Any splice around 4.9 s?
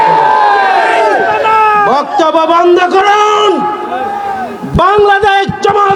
no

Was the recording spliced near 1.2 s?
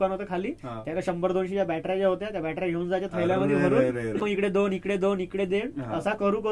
no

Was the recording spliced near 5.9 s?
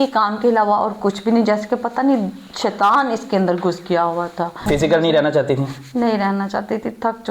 no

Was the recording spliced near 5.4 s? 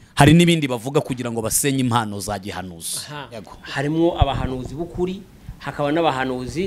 no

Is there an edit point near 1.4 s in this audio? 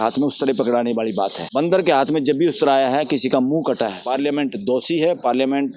yes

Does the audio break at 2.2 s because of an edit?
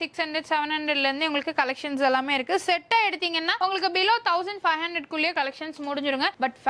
no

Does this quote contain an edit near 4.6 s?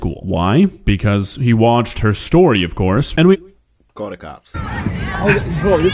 yes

